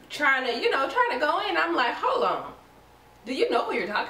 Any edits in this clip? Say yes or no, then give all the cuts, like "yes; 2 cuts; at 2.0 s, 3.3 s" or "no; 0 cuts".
no; 0 cuts